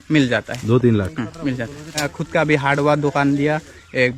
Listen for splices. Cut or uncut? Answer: cut